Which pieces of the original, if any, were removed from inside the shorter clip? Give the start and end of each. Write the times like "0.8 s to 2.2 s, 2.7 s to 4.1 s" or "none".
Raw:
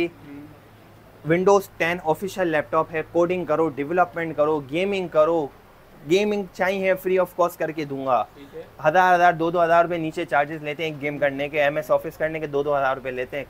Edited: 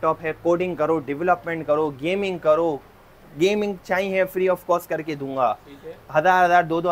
none